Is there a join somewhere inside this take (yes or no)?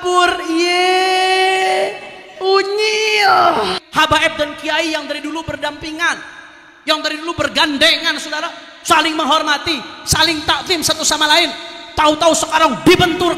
yes